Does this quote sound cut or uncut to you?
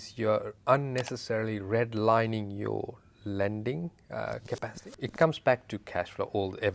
cut